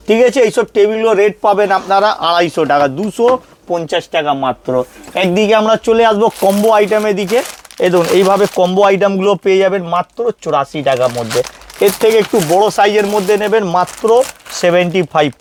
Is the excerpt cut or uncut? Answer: uncut